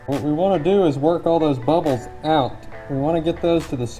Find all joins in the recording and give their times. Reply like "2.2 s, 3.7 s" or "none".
none